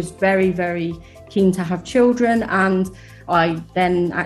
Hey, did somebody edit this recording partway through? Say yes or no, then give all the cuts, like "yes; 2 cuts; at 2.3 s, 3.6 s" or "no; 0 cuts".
yes; 1 cut; at 3.2 s